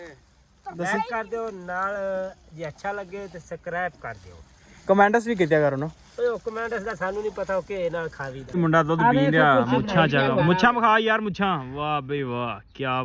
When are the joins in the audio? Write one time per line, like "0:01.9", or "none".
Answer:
0:08.4

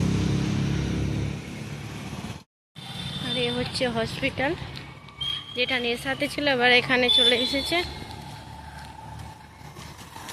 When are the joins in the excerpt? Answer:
0:02.4

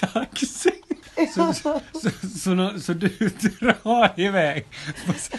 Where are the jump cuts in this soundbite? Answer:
0:01.1

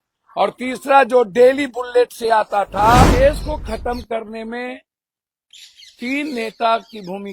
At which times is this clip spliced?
0:03.0

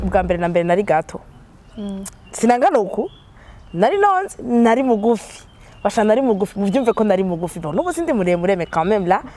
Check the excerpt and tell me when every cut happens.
none

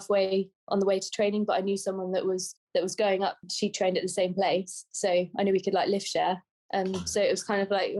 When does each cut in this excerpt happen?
none

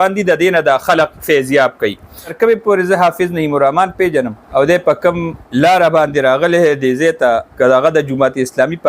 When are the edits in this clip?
0:02.3
0:04.4
0:05.4
0:07.5

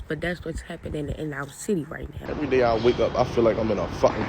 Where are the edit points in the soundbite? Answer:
0:02.2

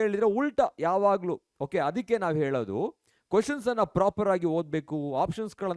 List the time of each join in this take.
none

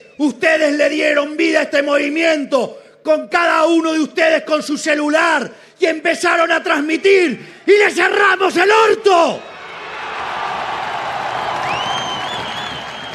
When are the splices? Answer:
none

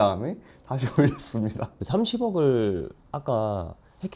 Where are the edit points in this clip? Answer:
0:01.7

